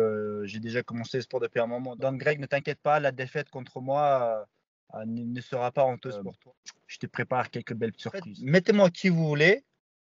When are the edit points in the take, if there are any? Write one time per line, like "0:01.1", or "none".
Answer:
0:01.8
0:06.3
0:08.4